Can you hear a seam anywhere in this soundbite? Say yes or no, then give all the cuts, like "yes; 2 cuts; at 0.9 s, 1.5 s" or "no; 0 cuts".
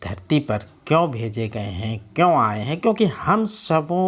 no; 0 cuts